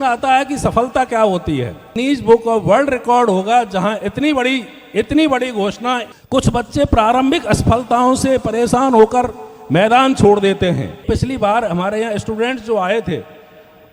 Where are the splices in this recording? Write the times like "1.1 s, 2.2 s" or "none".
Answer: 1.9 s, 6.0 s, 11.0 s